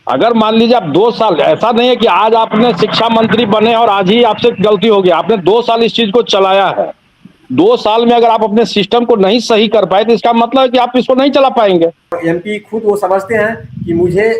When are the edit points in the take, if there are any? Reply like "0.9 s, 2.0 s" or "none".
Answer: 12.2 s